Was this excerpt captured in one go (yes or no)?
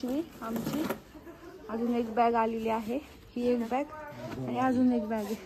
yes